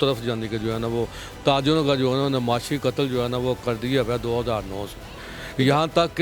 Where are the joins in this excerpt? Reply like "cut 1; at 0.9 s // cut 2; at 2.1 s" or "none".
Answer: none

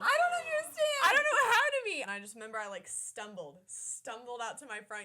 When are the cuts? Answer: cut 1; at 2.0 s

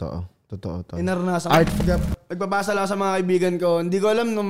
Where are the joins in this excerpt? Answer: cut 1; at 1.7 s

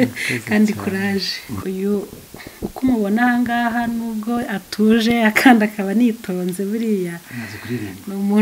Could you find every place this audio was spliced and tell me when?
cut 1; at 1.5 s

